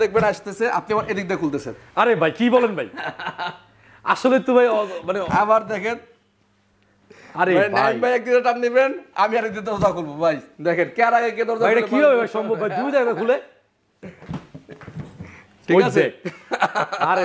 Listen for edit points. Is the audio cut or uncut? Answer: uncut